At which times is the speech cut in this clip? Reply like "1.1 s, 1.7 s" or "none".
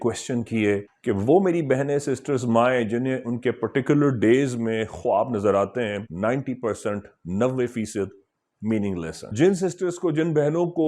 0.9 s, 6.1 s, 9.3 s